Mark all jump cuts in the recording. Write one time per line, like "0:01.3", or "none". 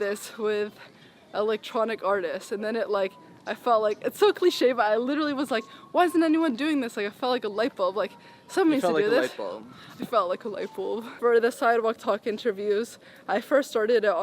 0:11.1